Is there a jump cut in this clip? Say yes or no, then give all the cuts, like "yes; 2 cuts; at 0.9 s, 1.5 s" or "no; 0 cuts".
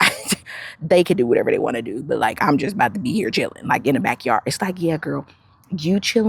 no; 0 cuts